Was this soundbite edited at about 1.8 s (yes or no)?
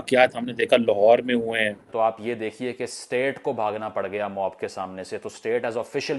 yes